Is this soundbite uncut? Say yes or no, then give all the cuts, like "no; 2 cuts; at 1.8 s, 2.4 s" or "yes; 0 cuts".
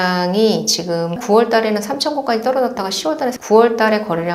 no; 2 cuts; at 1.2 s, 3.4 s